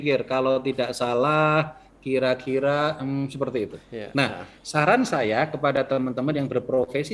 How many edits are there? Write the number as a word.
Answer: zero